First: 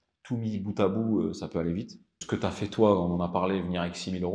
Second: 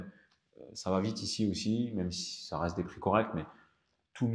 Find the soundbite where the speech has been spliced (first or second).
first